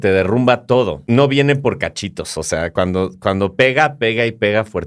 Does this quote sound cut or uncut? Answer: cut